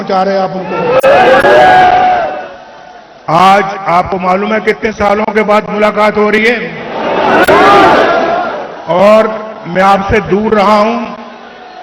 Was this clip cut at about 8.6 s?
no; 2 cuts; at 1.6 s, 6.1 s

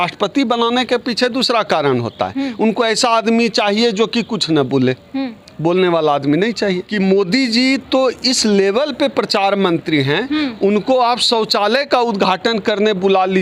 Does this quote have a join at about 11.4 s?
no; 1 cut; at 6.9 s

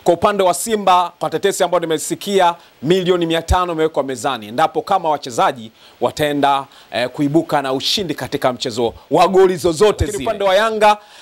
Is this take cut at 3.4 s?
no; 1 cut; at 10.2 s

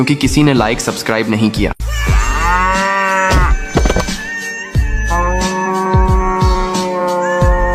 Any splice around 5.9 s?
no; 0 cuts

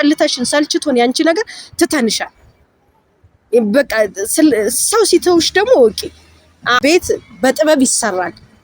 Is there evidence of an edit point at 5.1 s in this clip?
no; 1 cut; at 6.6 s

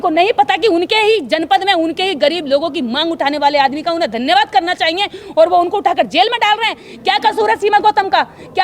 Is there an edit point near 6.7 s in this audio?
no; 0 cuts

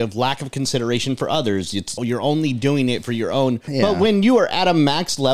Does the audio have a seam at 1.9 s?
yes; 2 cuts; at 1.9 s, 3.6 s

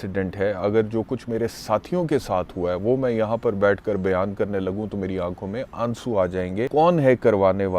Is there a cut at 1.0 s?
no; 1 cut; at 6.7 s

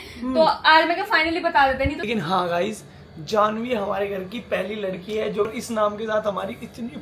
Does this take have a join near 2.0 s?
yes; 2 cuts; at 2.0 s, 5.5 s

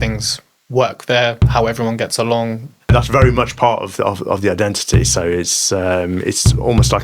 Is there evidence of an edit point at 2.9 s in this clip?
yes; 1 cut; at 2.9 s

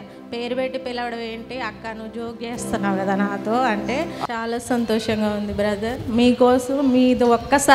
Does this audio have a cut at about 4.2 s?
yes; 1 cut; at 4.2 s

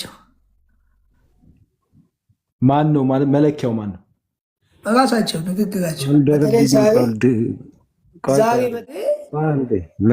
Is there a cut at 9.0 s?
yes; 1 cut; at 9.0 s

